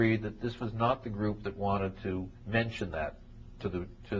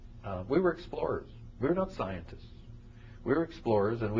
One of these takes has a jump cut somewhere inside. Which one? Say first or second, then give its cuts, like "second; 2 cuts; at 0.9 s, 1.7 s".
second; 1 cut; at 3.1 s